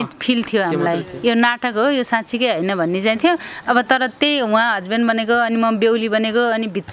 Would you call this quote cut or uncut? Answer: uncut